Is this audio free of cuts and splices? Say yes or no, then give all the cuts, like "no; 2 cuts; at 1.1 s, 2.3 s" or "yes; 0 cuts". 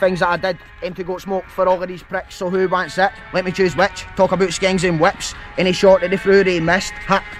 yes; 0 cuts